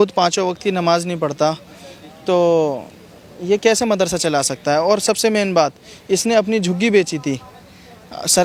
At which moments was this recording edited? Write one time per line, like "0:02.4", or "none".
none